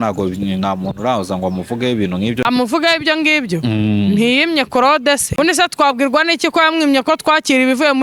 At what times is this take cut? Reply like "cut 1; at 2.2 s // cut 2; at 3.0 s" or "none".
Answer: cut 1; at 2.4 s // cut 2; at 5.4 s